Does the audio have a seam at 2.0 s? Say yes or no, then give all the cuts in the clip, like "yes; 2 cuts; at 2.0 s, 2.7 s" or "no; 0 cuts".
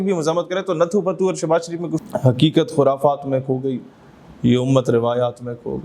yes; 1 cut; at 2.0 s